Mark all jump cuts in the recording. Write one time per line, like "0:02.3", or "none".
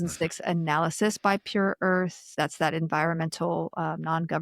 0:02.2